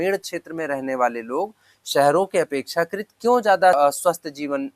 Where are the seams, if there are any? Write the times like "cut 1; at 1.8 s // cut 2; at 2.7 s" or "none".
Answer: cut 1; at 3.8 s